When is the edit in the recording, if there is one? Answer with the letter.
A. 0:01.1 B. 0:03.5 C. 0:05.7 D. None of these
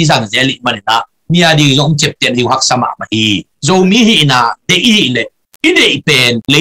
B